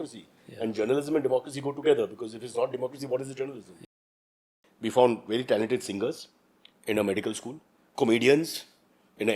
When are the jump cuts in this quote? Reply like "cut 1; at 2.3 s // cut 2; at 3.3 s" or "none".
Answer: cut 1; at 4.2 s // cut 2; at 7.8 s